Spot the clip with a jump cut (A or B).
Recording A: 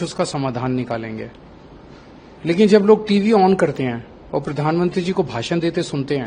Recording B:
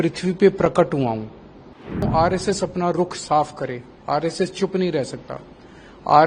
B